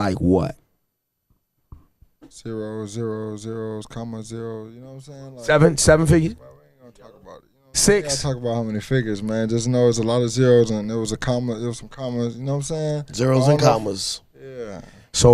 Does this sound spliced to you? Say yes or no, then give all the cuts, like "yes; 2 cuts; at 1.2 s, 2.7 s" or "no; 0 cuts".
yes; 1 cut; at 8.2 s